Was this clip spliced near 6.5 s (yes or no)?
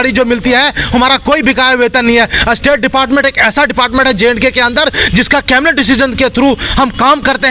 no